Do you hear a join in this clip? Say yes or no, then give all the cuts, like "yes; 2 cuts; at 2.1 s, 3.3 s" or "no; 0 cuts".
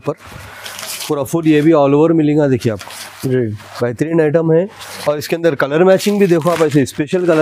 no; 0 cuts